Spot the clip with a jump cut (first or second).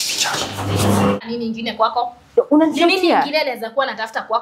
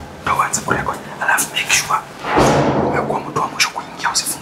first